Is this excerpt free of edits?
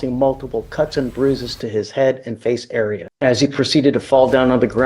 no; 1 cut; at 3.1 s

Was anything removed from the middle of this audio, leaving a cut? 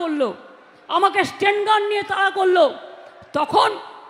no; 0 cuts

